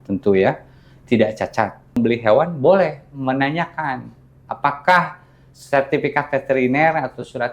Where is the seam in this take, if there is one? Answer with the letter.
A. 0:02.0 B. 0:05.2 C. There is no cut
A